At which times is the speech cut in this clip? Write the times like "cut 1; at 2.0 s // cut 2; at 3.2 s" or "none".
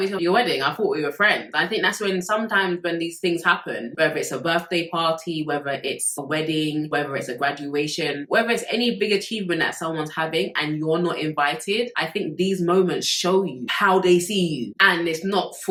none